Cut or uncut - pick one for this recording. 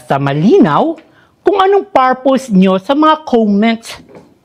uncut